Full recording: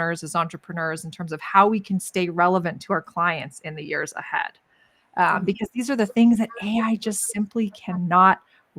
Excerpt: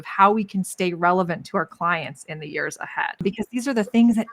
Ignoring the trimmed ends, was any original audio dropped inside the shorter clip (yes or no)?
yes